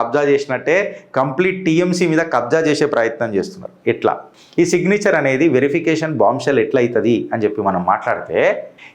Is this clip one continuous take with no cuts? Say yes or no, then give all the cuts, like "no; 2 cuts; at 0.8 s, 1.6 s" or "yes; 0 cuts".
yes; 0 cuts